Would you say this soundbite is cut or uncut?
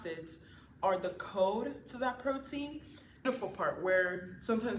cut